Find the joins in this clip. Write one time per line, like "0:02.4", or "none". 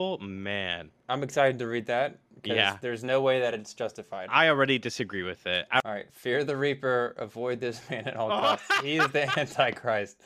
0:01.0
0:05.8